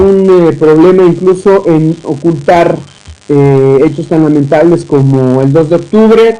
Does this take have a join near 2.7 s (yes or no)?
no